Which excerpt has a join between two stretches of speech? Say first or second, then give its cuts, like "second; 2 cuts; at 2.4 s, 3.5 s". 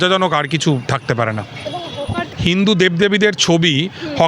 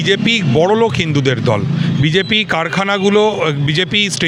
first; 1 cut; at 2.2 s